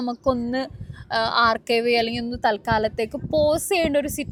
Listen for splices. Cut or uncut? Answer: uncut